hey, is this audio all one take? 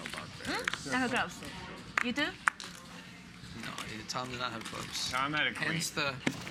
yes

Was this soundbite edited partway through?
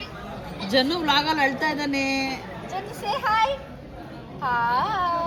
no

